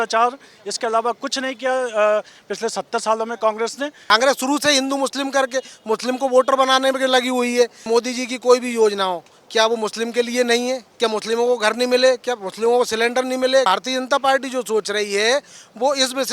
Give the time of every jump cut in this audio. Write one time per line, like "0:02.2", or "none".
0:04.1
0:07.8
0:10.9
0:13.7

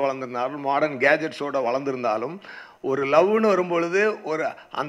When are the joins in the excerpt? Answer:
none

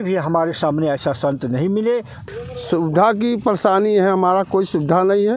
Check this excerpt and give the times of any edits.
0:02.2

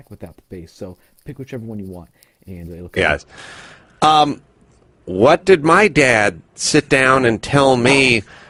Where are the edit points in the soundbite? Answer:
none

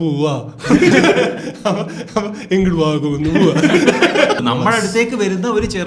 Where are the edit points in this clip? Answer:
0:04.4

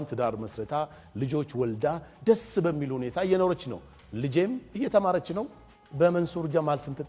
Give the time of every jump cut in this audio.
none

